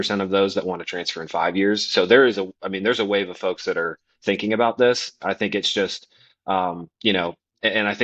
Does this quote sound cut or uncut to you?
uncut